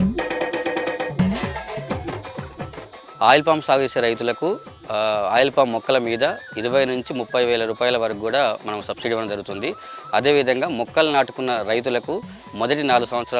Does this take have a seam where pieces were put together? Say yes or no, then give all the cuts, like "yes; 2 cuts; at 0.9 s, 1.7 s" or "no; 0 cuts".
yes; 1 cut; at 1.1 s